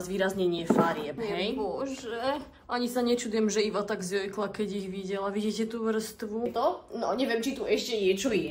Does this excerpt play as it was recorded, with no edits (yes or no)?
no